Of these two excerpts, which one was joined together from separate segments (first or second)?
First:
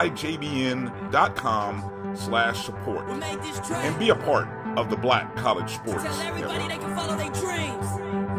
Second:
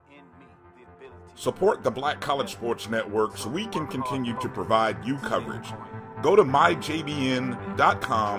second